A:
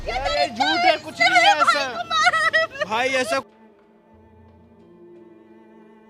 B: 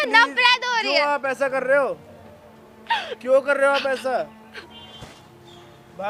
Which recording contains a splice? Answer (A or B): A